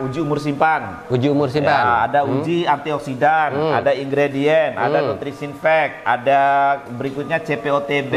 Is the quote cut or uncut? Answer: uncut